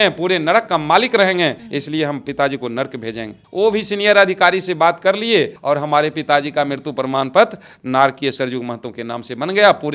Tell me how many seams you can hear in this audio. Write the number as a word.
zero